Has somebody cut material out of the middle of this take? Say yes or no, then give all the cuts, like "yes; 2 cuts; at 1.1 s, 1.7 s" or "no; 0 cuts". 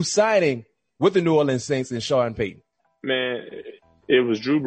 no; 0 cuts